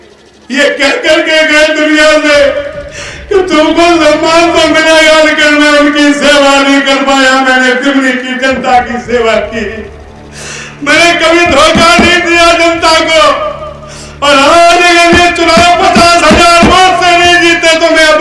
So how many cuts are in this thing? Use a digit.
0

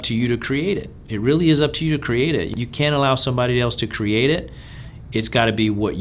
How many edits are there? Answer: 1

